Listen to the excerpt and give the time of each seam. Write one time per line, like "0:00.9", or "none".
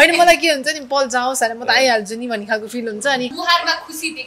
0:03.4